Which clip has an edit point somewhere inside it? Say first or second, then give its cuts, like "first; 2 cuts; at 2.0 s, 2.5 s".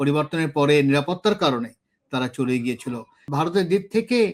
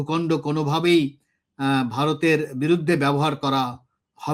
first; 1 cut; at 3.3 s